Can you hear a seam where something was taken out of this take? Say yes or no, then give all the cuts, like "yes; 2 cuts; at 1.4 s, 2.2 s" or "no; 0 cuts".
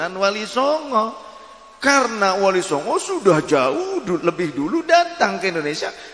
no; 0 cuts